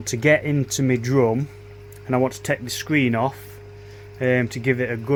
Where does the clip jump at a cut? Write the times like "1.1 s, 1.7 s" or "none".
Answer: none